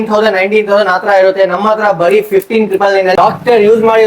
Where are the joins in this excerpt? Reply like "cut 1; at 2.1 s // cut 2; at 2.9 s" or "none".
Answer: cut 1; at 3.1 s